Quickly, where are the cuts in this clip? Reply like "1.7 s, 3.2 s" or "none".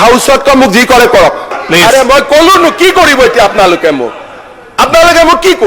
1.5 s, 4.0 s